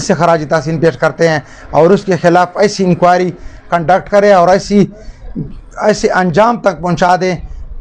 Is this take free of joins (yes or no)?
yes